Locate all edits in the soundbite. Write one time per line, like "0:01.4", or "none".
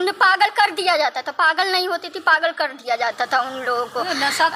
none